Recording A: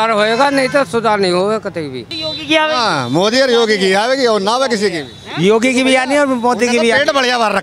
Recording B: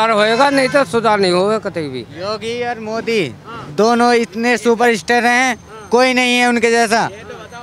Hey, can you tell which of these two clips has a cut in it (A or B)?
A